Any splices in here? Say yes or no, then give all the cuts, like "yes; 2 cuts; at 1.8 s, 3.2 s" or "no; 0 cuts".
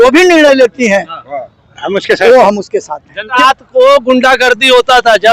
yes; 1 cut; at 3.3 s